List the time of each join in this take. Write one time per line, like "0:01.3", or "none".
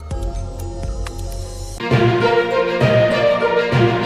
0:01.8